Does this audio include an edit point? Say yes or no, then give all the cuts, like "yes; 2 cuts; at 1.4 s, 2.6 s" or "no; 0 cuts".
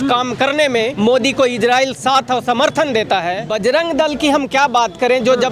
yes; 2 cuts; at 0.9 s, 3.4 s